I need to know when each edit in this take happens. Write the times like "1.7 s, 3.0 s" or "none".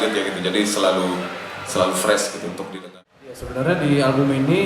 2.8 s